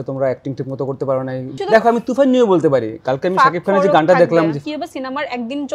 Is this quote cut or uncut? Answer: cut